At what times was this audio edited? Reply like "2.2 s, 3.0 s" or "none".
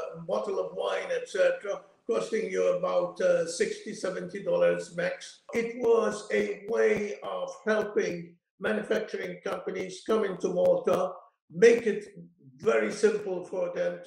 5.5 s